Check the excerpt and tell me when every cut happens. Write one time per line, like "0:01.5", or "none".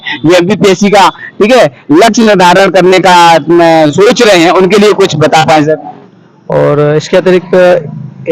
0:06.0